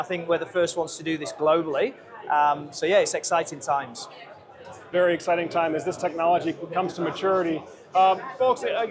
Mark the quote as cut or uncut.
uncut